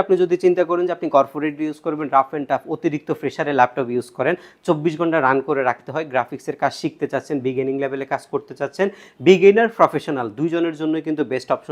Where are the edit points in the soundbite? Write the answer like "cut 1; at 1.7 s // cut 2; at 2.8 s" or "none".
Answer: none